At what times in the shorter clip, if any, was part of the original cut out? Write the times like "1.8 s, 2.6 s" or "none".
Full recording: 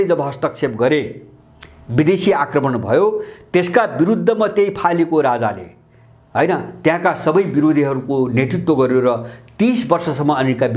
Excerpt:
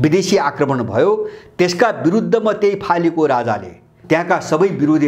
4.0 s

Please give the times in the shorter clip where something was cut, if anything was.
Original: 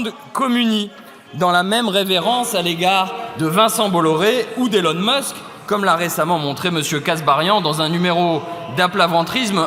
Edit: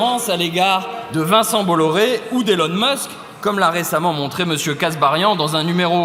none

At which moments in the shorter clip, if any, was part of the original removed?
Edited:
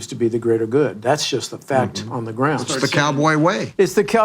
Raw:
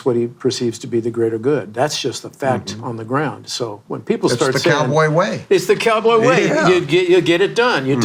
2.8 s

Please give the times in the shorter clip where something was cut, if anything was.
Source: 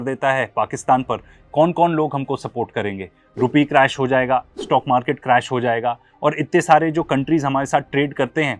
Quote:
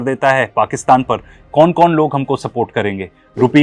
none

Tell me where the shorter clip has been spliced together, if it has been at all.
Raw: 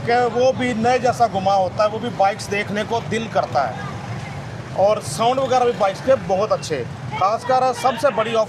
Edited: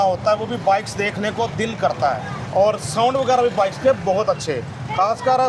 2.4 s

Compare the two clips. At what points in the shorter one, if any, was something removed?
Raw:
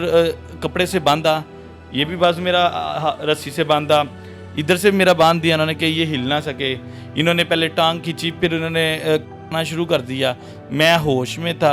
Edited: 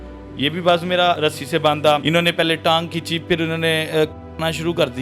1.2 s, 2.0 s

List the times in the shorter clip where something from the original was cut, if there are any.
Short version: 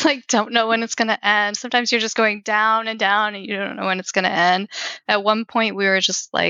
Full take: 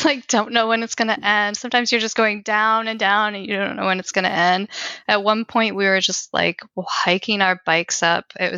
none

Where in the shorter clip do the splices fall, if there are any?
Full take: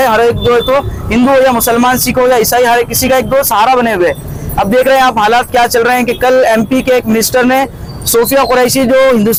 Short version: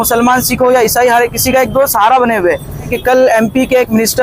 2.9 s

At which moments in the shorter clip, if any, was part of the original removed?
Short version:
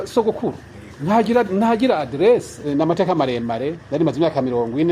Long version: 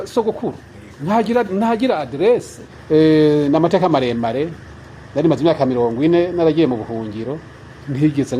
2.7 s, 3.8 s

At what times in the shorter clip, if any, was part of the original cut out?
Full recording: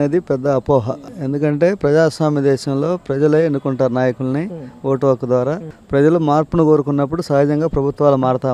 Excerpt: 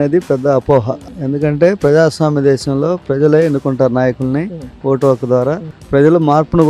none

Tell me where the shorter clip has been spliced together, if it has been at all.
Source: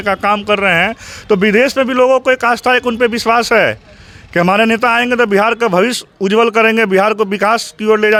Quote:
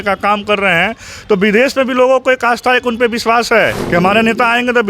3.8 s

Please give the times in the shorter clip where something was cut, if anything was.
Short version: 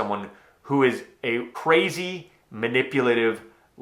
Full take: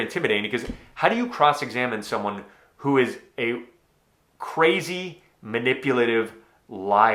1.5 s

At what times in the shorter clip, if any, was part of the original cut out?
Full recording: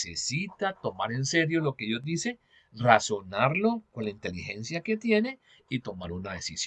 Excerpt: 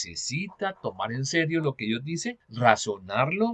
2.4 s

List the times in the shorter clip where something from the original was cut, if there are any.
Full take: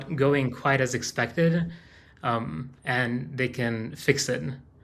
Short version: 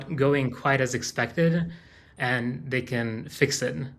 2.0 s

